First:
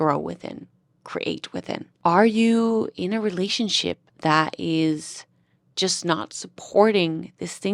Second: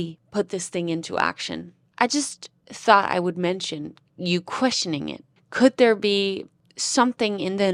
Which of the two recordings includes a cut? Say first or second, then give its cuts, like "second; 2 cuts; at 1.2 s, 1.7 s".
first; 1 cut; at 1.9 s